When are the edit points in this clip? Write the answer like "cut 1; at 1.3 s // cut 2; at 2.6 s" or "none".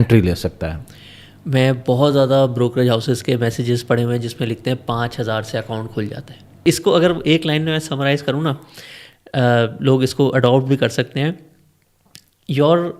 cut 1; at 6.6 s